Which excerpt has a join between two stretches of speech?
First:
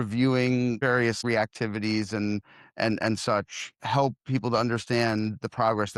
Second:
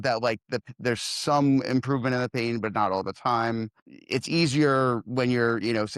first; 1 cut; at 0.9 s

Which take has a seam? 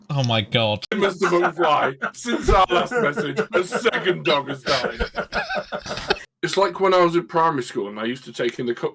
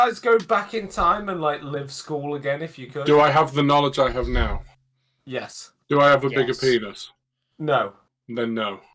first; 2 cuts; at 0.9 s, 6.2 s

